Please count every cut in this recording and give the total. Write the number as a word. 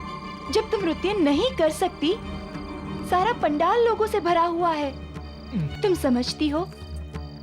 one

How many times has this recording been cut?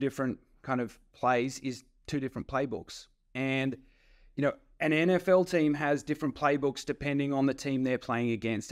zero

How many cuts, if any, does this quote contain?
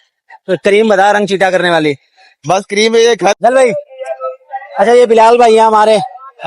one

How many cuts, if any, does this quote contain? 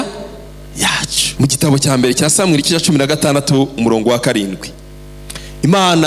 one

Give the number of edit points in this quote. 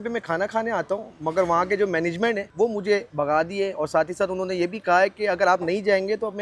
one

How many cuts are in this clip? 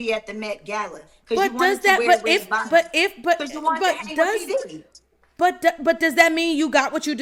zero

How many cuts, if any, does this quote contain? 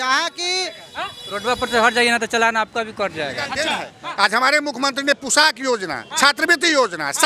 one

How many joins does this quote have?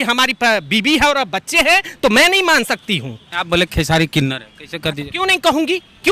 one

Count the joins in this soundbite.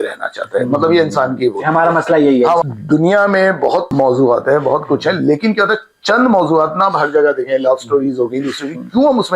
two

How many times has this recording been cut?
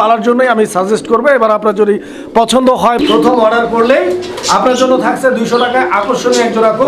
one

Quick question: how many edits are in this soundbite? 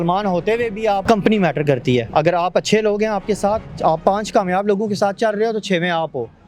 three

